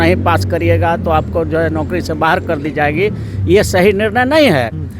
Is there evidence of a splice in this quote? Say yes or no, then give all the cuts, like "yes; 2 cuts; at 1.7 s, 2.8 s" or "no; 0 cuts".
no; 0 cuts